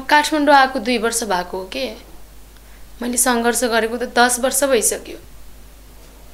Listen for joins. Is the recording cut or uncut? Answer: cut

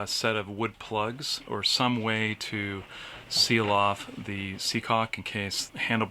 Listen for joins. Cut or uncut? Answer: uncut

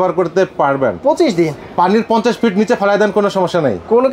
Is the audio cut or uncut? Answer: uncut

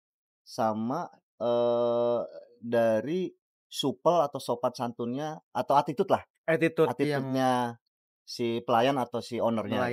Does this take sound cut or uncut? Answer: uncut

